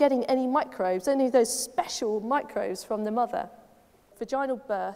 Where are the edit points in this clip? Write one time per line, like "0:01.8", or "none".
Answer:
0:04.1